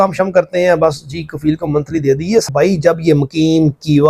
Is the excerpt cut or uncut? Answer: cut